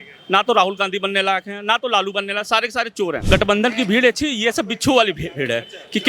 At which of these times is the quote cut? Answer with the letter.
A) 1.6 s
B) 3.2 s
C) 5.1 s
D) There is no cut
B